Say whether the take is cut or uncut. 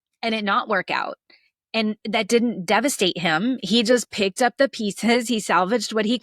uncut